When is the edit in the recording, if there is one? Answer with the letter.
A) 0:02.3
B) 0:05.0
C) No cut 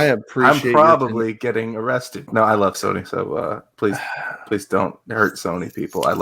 A